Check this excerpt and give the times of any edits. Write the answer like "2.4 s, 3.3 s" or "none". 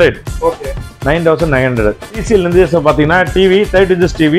2.1 s